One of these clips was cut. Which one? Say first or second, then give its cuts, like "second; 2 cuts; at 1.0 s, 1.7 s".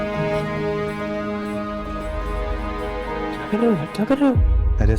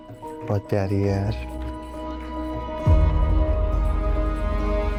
first; 1 cut; at 2.2 s